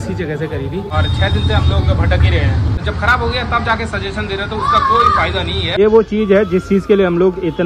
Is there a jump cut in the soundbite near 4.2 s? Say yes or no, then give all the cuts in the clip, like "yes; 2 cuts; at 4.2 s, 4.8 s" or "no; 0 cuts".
no; 3 cuts; at 0.9 s, 2.8 s, 5.8 s